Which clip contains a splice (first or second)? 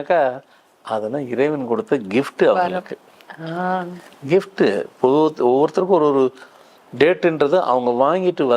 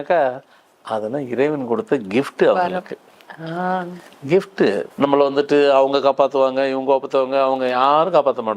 second